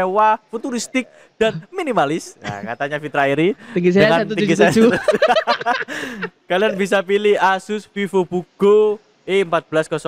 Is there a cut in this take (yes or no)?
no